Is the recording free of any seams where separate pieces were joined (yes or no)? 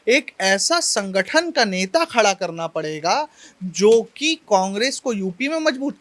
yes